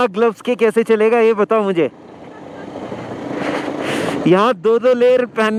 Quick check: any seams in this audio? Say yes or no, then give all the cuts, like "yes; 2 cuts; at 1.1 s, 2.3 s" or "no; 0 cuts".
no; 0 cuts